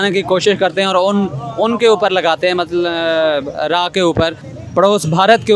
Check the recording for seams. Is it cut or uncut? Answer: cut